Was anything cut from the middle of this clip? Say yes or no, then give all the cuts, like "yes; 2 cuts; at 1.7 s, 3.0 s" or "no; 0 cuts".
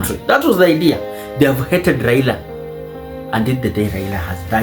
yes; 1 cut; at 1.2 s